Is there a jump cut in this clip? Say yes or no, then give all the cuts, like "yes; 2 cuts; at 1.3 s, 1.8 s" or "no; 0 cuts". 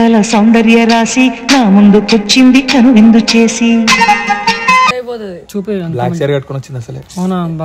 yes; 1 cut; at 5.0 s